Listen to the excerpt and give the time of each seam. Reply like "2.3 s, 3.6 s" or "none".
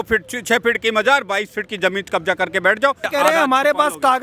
3.1 s